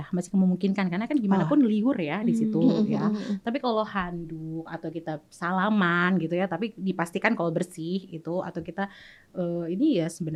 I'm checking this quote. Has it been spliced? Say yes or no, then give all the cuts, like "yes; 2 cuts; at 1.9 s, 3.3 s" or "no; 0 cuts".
no; 0 cuts